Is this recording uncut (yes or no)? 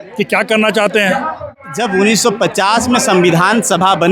no